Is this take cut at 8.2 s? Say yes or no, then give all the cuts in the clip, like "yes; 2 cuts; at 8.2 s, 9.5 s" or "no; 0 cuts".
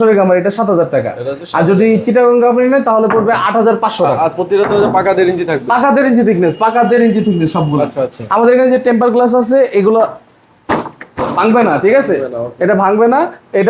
no; 0 cuts